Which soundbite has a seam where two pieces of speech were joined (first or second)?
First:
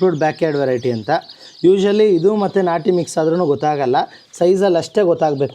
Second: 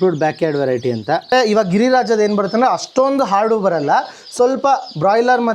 second